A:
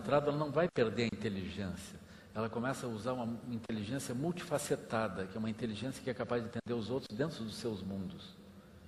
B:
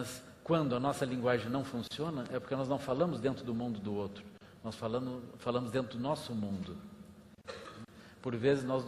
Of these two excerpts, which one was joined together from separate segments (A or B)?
B